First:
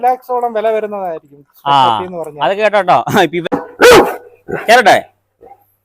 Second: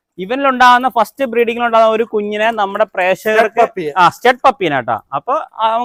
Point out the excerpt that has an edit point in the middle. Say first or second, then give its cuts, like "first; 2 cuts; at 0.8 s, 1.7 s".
first; 1 cut; at 3.6 s